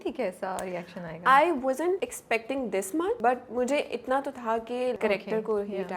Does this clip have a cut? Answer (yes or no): yes